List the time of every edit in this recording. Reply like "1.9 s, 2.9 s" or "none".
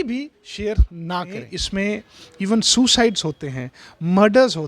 1.6 s